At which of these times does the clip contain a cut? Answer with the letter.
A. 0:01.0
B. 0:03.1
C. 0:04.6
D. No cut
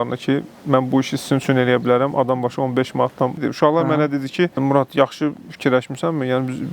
C